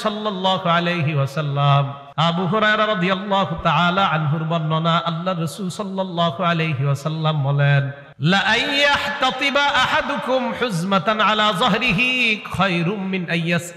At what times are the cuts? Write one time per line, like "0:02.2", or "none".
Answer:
0:02.0
0:08.0